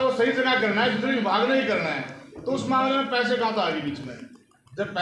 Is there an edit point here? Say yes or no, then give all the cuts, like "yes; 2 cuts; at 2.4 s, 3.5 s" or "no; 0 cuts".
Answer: no; 0 cuts